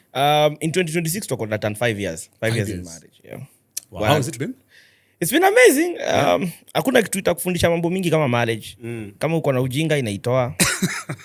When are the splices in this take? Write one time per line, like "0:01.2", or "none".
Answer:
none